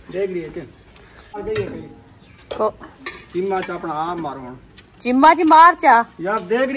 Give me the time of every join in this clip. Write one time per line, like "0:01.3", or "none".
0:01.4